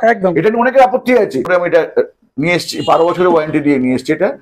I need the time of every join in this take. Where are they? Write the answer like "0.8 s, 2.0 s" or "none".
1.5 s